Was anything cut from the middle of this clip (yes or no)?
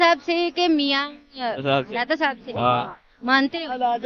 no